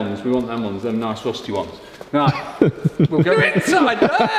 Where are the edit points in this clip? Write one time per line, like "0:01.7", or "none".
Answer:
none

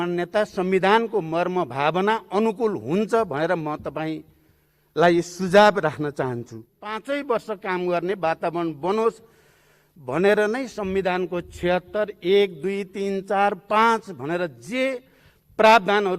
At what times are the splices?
0:06.9

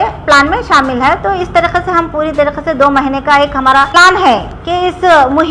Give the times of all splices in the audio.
0:03.9

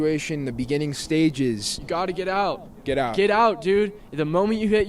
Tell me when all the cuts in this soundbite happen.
none

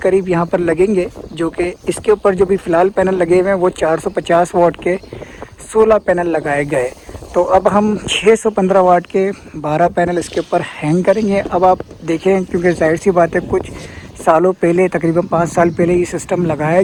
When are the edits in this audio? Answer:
none

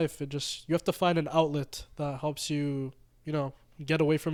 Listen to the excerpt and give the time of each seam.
none

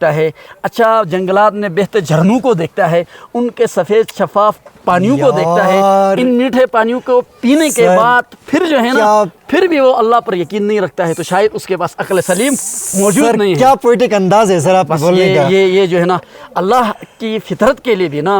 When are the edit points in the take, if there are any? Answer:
none

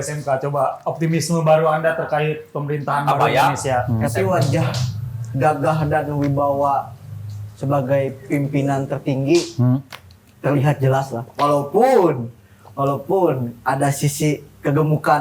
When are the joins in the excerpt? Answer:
0:03.9

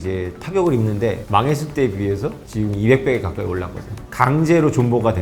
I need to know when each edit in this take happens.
0:01.2
0:04.0

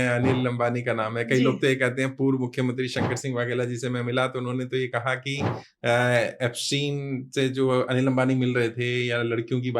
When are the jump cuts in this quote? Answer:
none

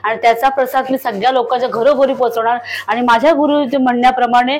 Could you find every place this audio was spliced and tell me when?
none

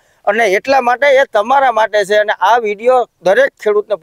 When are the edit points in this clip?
0:03.1

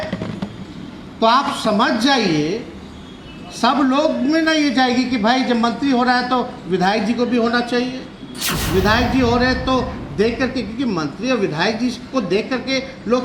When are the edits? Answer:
none

